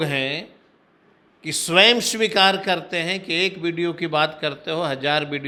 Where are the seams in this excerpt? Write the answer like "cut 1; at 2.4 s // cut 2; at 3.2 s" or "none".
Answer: none